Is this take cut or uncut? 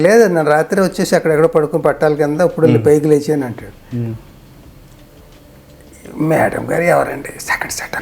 uncut